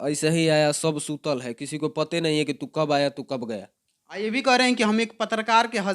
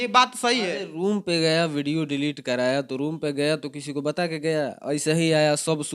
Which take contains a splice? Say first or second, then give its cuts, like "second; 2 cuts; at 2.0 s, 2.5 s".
first; 1 cut; at 3.6 s